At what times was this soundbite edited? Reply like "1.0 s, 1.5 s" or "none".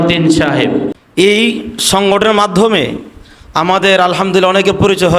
1.0 s